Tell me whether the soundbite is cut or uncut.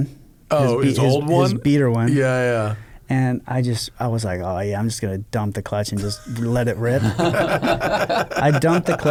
uncut